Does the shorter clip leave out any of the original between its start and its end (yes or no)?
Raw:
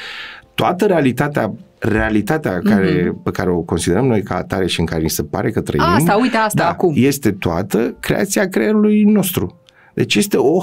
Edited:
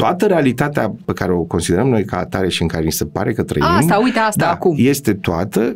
yes